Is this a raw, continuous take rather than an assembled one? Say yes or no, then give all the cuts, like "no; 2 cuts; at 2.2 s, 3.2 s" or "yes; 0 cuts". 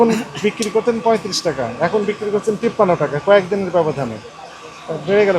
yes; 0 cuts